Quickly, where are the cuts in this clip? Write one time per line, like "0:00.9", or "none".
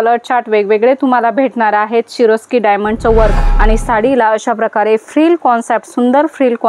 0:03.5